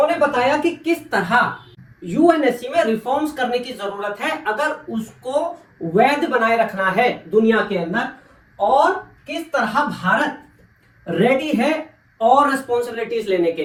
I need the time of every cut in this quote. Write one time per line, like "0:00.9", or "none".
none